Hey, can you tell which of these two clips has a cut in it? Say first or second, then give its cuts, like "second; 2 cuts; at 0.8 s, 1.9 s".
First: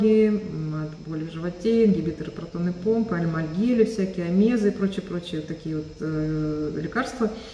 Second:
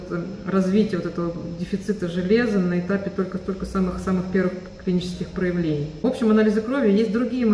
second; 1 cut; at 6.0 s